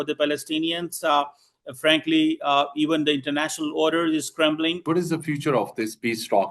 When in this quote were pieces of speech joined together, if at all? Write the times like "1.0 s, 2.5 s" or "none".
4.8 s